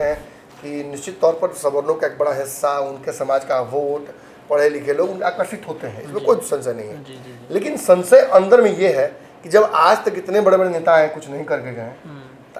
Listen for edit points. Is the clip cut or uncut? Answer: uncut